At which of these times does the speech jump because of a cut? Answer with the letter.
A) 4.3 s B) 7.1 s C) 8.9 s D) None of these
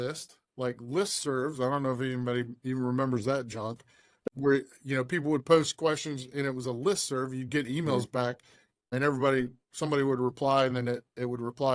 D